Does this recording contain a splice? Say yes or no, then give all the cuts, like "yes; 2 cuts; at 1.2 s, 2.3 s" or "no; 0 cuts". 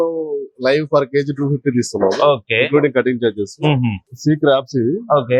yes; 1 cut; at 4.0 s